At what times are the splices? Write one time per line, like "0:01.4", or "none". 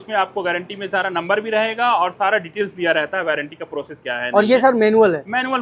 none